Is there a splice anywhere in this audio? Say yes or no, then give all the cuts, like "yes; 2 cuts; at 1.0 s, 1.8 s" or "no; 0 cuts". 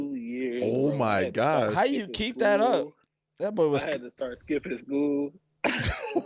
no; 0 cuts